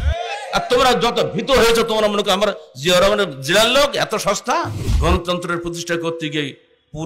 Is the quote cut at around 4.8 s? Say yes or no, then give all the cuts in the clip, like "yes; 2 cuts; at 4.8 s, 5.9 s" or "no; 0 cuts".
yes; 1 cut; at 4.8 s